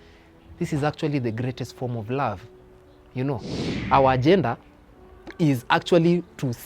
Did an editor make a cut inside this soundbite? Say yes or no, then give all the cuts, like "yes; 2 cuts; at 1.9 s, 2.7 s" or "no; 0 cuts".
yes; 1 cut; at 3.7 s